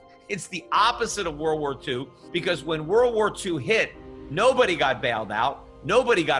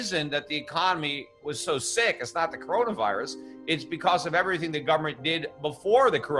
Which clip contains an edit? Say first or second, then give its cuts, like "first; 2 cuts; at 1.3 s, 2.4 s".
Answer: first; 1 cut; at 2.1 s